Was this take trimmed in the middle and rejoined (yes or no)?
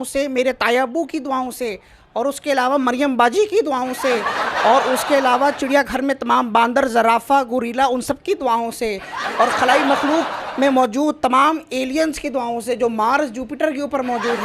no